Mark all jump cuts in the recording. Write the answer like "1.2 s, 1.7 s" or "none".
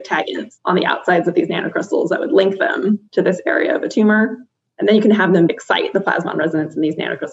5.5 s

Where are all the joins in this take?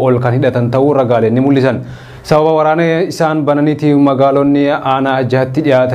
none

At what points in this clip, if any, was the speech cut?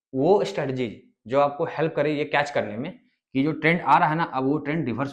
none

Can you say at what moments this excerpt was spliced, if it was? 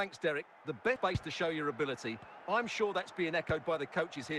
1.0 s

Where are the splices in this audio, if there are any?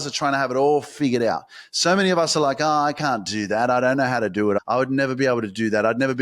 4.6 s

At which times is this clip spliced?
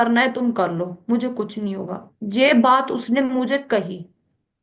none

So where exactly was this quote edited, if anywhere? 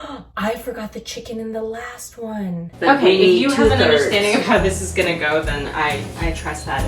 2.7 s

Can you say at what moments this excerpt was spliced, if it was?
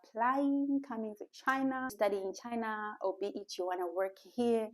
1.9 s

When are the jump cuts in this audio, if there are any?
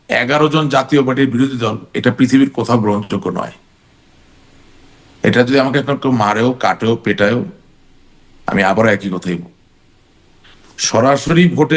none

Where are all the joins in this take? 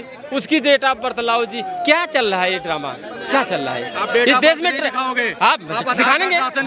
none

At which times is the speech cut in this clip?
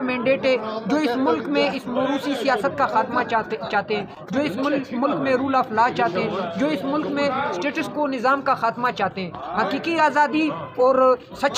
none

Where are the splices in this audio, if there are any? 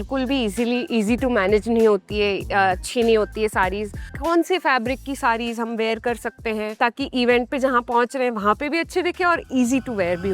4.1 s, 6.8 s

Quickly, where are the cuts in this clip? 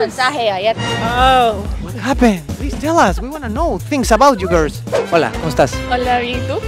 4.8 s

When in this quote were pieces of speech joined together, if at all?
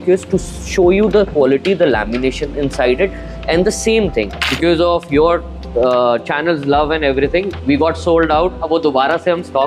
4.5 s

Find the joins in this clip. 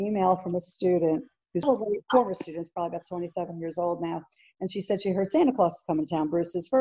1.6 s

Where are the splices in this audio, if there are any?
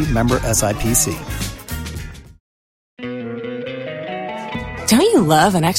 3.0 s

